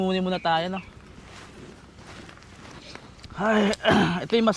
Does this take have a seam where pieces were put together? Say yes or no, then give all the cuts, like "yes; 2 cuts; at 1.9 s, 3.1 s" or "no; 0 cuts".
no; 0 cuts